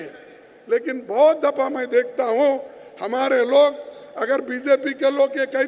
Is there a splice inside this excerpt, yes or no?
no